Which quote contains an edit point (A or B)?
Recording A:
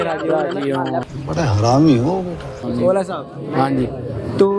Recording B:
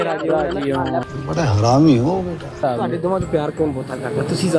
B